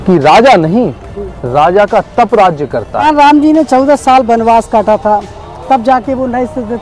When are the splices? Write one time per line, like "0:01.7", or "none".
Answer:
0:03.0